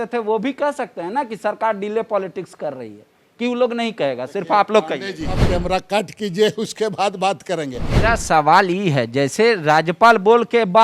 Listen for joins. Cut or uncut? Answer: cut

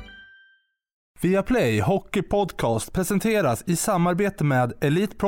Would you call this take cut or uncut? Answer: cut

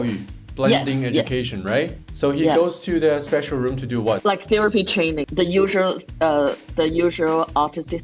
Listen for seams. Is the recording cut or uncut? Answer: cut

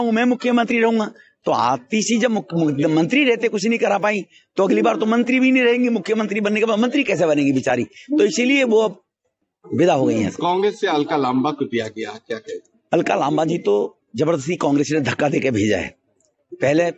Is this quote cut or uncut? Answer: uncut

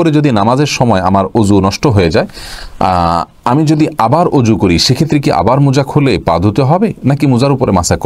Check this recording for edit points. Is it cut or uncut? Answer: uncut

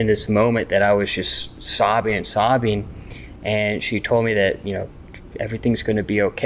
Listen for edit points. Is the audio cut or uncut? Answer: uncut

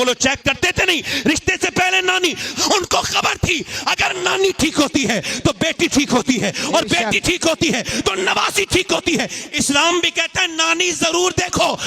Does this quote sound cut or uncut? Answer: cut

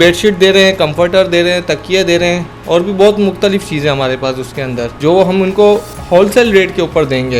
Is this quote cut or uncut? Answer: cut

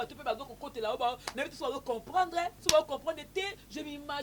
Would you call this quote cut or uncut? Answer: cut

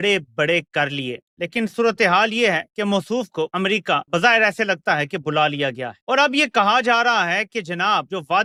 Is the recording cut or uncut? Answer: uncut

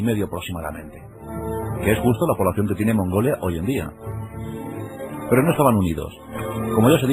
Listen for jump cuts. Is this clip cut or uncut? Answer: cut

